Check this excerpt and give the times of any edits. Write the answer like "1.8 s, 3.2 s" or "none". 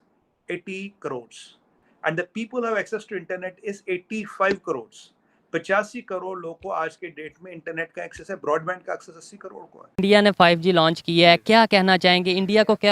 10.0 s

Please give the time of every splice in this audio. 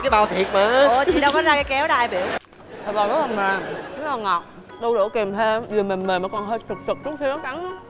2.4 s

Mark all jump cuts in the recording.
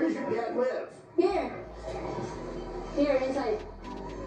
none

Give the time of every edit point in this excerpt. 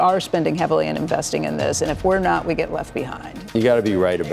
3.4 s

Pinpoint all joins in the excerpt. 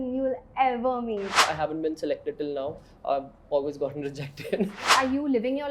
1.4 s, 4.9 s

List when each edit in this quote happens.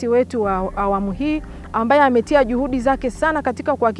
none

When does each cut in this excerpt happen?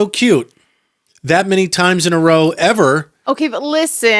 3.1 s

